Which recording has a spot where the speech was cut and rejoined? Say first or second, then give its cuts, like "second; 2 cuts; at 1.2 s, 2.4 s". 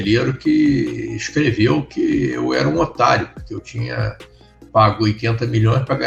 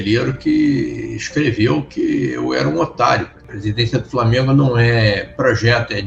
second; 1 cut; at 3.4 s